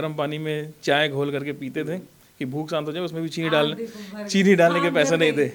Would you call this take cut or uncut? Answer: uncut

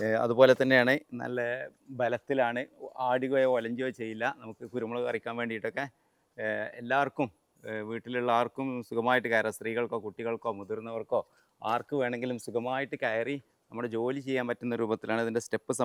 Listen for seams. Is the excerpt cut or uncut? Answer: uncut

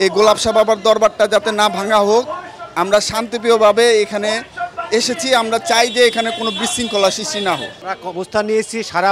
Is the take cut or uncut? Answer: uncut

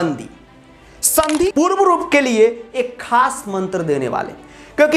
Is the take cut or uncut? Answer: cut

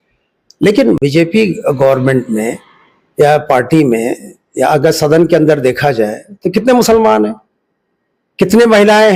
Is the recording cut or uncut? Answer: cut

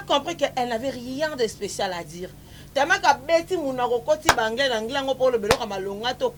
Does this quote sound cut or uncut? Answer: uncut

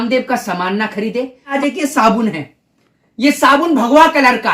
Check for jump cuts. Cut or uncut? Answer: cut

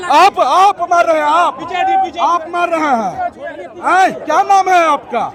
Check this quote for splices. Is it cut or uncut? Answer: uncut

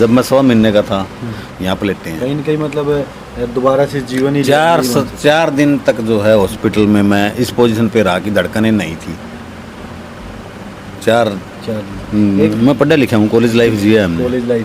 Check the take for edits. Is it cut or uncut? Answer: cut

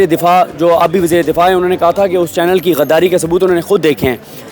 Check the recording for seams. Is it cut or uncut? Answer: uncut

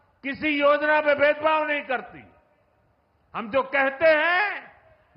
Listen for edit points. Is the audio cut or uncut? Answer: uncut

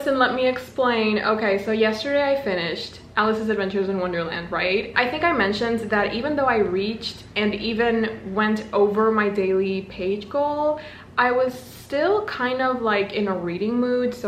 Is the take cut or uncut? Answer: uncut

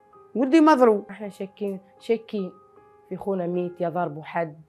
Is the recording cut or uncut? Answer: uncut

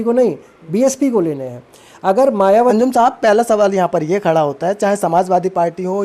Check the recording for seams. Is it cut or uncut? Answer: cut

